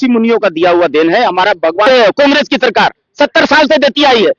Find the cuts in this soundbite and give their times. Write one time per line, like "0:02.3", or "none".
0:01.9

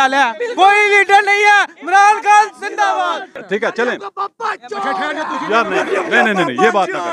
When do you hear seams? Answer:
0:03.3

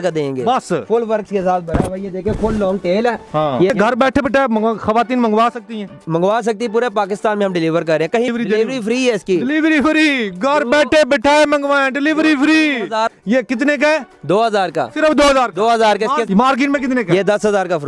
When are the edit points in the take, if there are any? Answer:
0:03.7
0:08.3
0:13.1

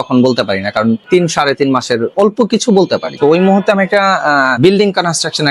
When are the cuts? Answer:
0:01.0
0:02.1
0:03.1
0:04.5

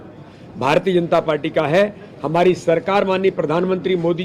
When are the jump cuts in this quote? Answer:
none

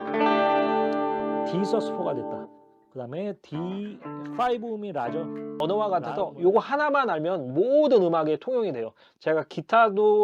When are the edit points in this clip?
0:05.6

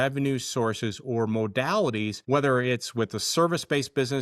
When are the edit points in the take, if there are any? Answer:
0:02.2

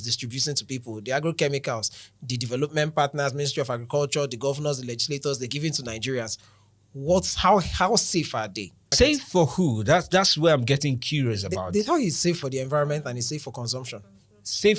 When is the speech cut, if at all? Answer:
0:08.8

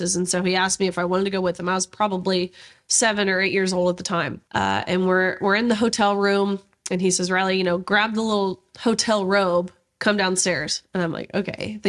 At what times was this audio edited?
0:04.4

